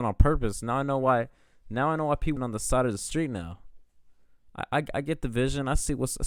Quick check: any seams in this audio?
no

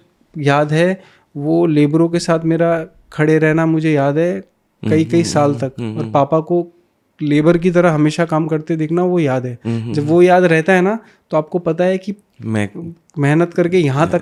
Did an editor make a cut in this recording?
no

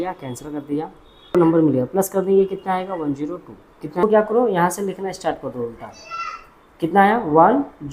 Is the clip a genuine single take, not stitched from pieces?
no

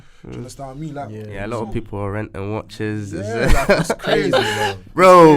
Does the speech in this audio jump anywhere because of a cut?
yes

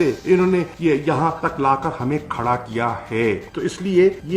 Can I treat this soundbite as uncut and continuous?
yes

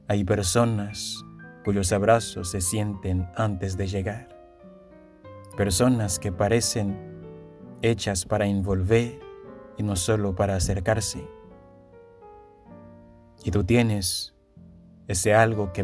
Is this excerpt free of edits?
no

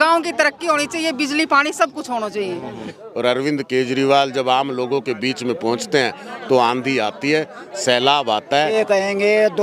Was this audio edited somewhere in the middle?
yes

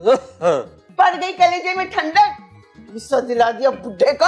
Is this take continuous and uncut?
yes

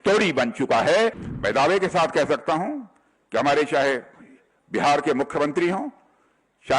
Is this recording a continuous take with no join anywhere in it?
no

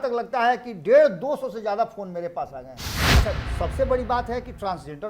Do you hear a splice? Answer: yes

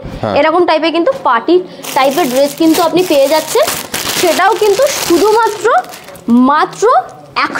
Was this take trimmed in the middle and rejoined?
no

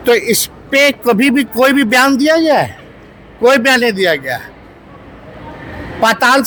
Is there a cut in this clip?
no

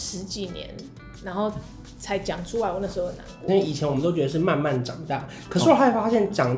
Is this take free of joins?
no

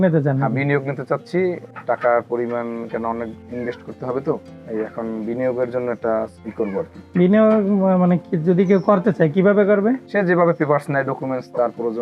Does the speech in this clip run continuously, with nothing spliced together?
no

